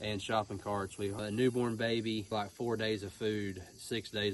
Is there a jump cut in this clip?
yes; 2 cuts; at 1.2 s, 2.3 s

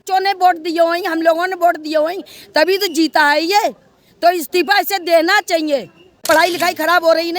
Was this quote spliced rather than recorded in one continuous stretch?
yes; 1 cut; at 6.2 s

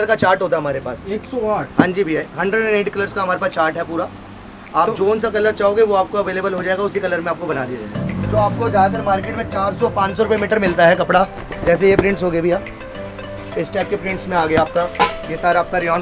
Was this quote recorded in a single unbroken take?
no; 1 cut; at 8.0 s

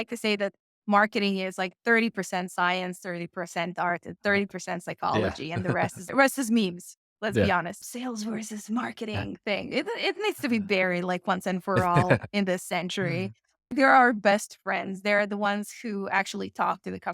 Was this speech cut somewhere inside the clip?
yes; 1 cut; at 7.8 s

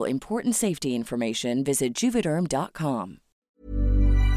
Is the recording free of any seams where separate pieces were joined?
no; 1 cut; at 3.5 s

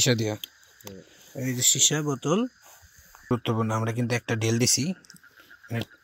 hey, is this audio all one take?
no; 1 cut; at 3.3 s

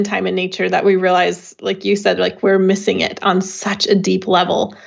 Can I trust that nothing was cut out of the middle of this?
yes; 0 cuts

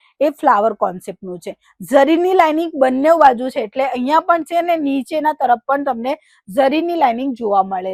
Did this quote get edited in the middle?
no; 0 cuts

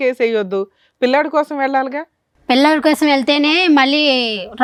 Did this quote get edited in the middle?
no; 0 cuts

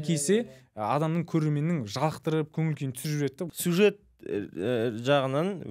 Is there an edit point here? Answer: yes; 1 cut; at 3.5 s

